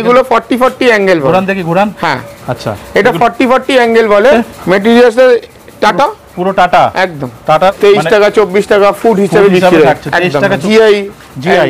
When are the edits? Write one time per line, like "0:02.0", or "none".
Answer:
0:04.3
0:07.7
0:10.6

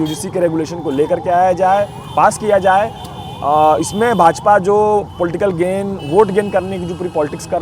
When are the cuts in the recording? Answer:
none

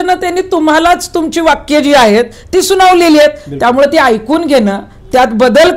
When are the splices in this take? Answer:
none

